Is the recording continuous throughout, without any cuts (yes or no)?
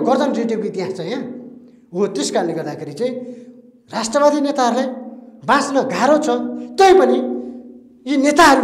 yes